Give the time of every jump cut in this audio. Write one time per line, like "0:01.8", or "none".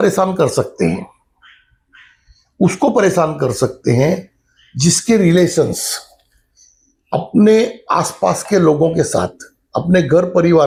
none